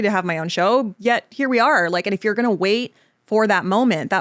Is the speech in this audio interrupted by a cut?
yes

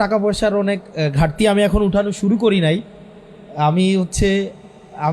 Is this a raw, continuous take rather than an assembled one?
yes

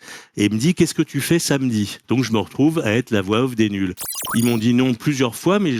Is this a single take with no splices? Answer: no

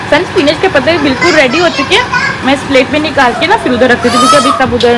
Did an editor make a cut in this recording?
no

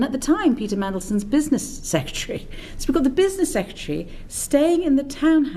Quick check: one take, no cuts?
yes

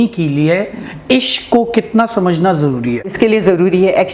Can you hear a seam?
yes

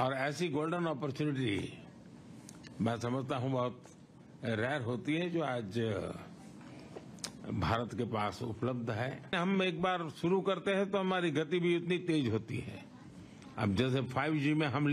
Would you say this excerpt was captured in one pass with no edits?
no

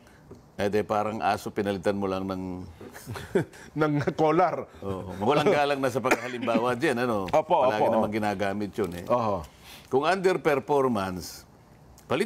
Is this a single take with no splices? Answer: yes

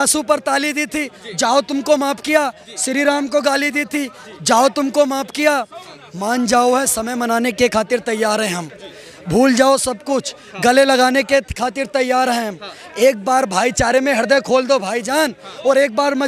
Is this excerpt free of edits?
yes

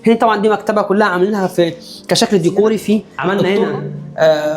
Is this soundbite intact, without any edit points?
no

